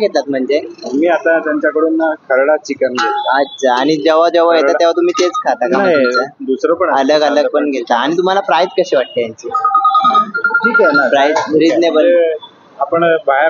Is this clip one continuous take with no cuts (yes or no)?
yes